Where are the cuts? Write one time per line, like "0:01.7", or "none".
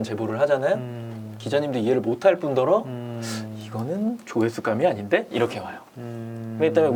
none